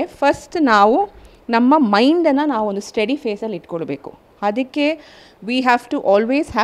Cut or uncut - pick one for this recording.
uncut